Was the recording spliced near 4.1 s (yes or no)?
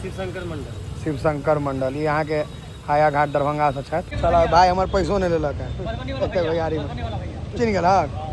yes